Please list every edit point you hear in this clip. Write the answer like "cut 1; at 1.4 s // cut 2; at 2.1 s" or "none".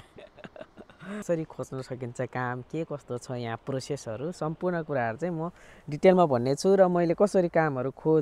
cut 1; at 1.2 s

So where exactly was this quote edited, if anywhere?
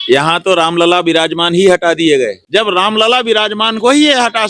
cut 1; at 2.4 s

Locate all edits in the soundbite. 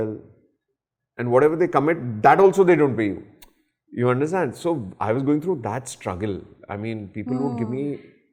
none

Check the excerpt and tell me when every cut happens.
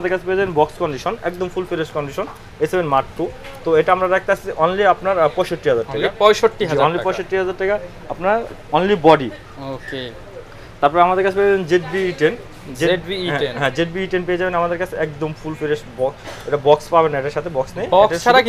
none

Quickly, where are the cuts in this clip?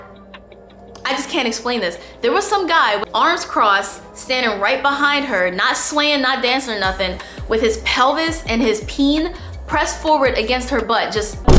cut 1; at 3.0 s

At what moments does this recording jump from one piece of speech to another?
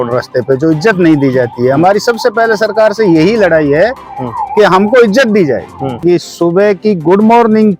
cut 1; at 6.0 s

